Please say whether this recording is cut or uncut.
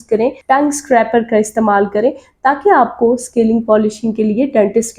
uncut